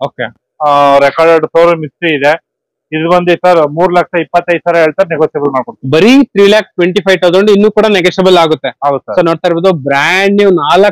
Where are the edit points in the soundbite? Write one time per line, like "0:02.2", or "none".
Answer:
none